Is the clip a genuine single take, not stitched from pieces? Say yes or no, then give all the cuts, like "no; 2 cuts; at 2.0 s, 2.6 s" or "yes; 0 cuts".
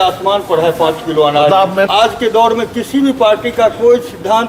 no; 1 cut; at 1.9 s